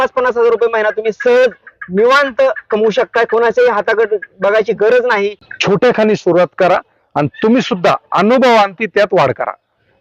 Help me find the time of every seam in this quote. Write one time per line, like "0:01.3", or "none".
0:05.5

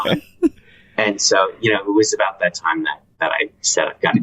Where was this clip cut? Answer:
0:03.0

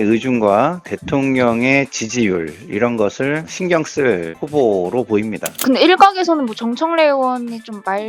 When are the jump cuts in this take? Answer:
0:05.6

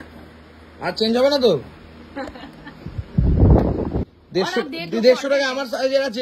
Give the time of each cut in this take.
0:04.0

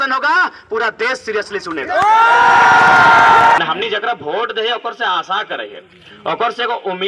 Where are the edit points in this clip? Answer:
0:03.6

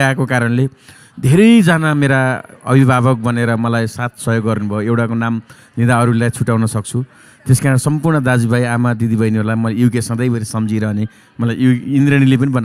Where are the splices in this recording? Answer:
none

